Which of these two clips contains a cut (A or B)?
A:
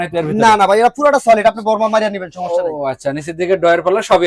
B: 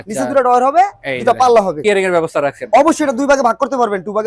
B